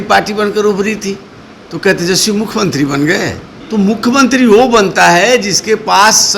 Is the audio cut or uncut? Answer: cut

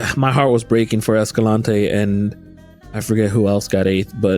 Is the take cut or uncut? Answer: uncut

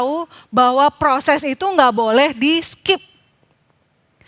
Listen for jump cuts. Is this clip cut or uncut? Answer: uncut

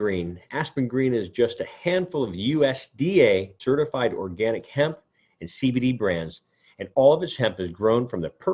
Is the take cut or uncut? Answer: cut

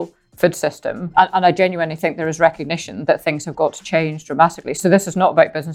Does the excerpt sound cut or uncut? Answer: cut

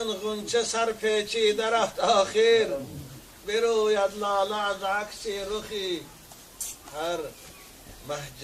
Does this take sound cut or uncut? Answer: uncut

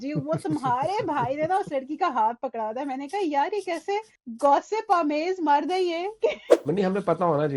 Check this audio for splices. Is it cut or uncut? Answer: cut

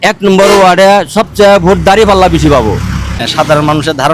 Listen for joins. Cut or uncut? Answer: cut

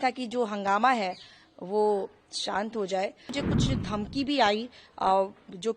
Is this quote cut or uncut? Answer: cut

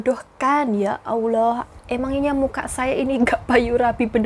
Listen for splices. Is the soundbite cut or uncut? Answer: uncut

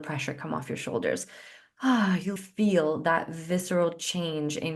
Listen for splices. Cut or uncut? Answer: cut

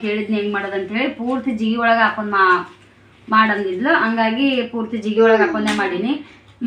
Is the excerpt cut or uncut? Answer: uncut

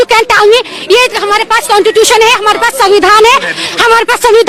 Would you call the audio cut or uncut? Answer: uncut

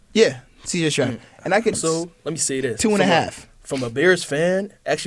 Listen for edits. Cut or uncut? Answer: cut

